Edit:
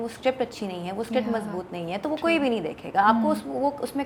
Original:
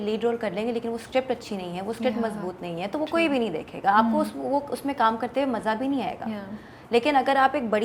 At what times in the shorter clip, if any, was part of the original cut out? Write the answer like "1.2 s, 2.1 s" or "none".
none